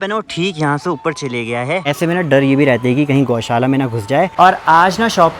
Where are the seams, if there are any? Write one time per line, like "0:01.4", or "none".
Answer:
0:01.9
0:04.3